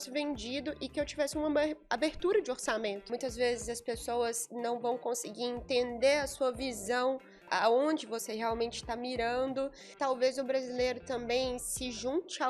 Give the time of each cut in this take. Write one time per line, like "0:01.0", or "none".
0:03.1
0:07.5
0:09.8